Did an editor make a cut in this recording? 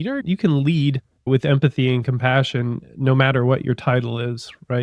yes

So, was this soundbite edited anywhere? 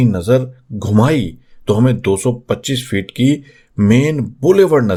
no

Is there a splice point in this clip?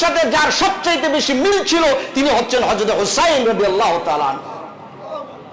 no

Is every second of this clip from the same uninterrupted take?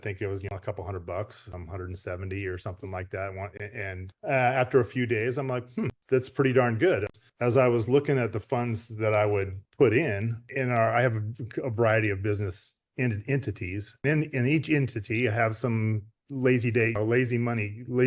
no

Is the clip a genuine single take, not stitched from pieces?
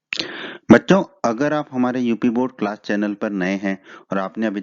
no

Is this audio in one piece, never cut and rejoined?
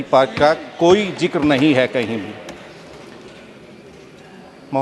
yes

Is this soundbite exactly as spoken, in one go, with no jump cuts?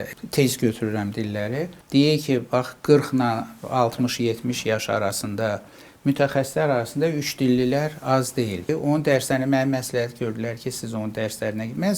no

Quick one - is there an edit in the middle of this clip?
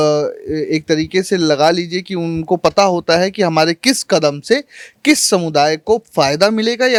no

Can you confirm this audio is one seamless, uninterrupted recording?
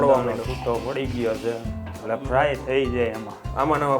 no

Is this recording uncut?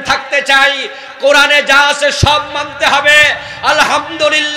yes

